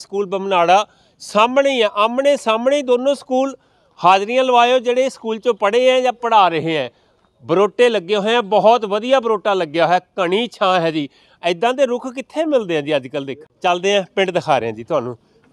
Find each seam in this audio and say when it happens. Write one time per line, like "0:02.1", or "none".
0:13.4